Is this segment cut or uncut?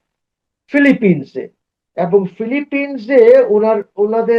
uncut